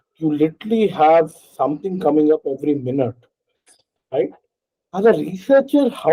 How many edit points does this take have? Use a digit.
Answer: 0